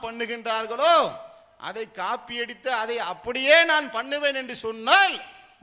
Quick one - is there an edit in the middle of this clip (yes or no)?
no